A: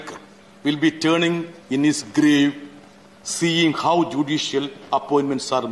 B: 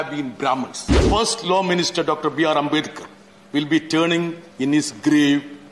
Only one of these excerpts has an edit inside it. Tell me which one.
B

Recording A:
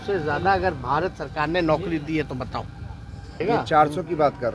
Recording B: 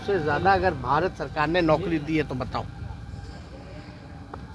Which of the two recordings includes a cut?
A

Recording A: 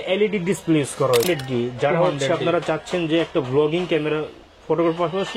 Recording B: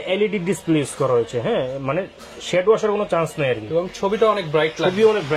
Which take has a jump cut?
A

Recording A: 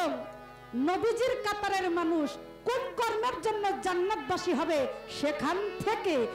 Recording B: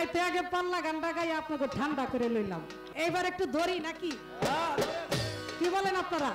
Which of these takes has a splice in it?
B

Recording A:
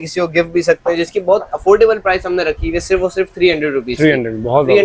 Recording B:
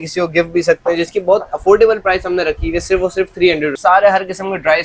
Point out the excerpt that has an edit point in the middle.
B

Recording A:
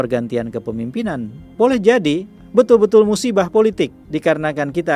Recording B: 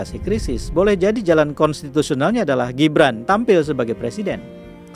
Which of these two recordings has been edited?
A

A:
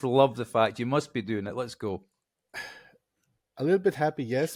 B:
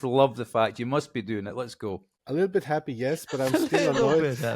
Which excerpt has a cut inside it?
B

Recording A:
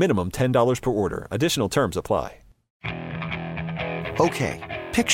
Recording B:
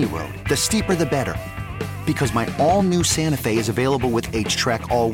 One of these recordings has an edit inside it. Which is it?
A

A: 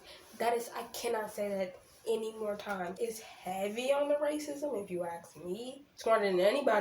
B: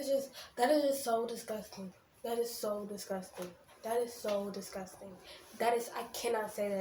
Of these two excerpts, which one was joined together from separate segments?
A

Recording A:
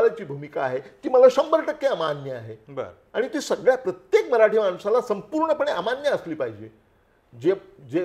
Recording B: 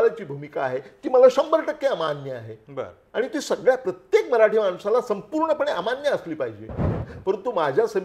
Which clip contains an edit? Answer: B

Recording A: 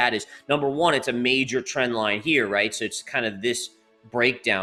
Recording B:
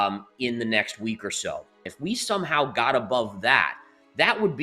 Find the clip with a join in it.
B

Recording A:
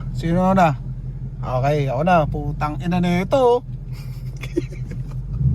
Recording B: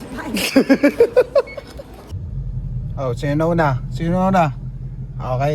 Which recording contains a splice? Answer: B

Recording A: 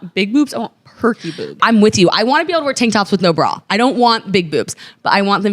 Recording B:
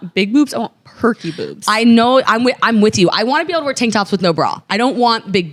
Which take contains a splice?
A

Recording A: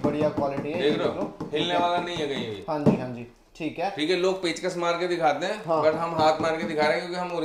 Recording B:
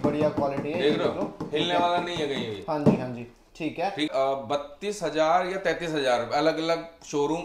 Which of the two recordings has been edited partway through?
B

